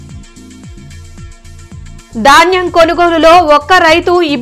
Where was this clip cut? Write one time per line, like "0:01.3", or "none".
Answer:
0:01.3

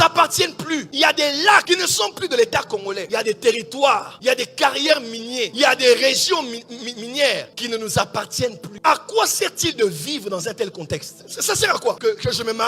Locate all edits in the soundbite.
0:08.8

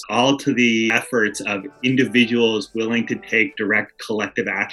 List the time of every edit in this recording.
none

